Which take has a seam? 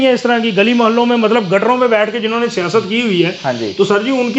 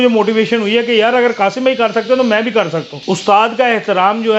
second; 1 cut; at 2.9 s

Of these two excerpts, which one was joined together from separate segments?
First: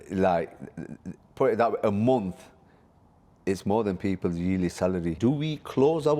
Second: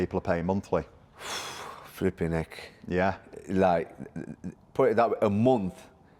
first; 1 cut; at 5.1 s

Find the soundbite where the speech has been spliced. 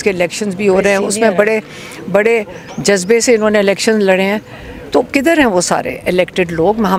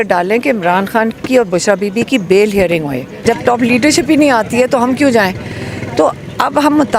second; 1 cut; at 3.1 s

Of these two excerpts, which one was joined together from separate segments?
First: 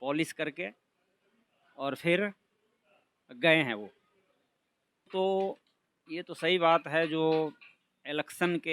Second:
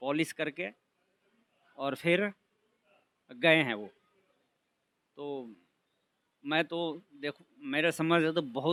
first; 1 cut; at 5.1 s

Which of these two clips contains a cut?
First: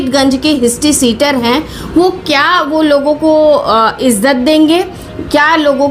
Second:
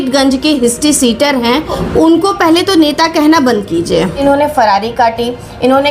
second; 2 cuts; at 1.8 s, 4.2 s

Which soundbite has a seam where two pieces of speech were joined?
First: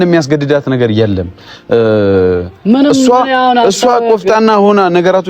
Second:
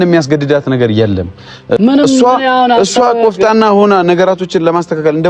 second; 1 cut; at 1.8 s

